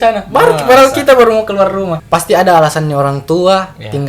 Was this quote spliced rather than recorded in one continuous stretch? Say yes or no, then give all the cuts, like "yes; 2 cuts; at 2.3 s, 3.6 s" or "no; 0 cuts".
yes; 1 cut; at 2.0 s